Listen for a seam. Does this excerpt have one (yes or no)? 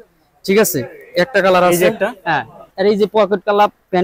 yes